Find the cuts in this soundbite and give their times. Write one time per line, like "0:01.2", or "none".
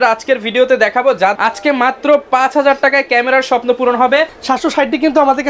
0:01.3
0:04.4